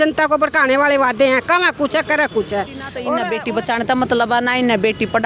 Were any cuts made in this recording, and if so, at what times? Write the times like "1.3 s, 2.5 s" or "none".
3.0 s